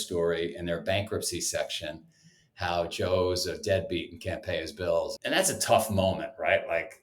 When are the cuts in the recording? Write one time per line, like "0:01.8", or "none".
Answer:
0:05.2